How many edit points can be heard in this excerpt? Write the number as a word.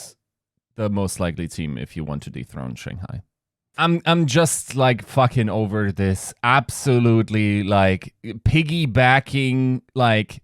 one